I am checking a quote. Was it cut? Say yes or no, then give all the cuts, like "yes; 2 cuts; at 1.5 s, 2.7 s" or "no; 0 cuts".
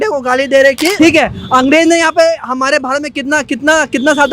yes; 1 cut; at 0.9 s